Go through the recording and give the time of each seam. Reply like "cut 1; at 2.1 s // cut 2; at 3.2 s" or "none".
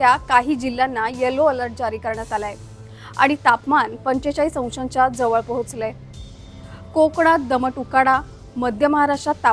cut 1; at 2.5 s